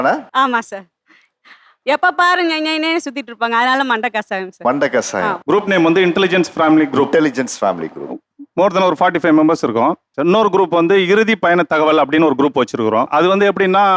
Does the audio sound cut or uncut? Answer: uncut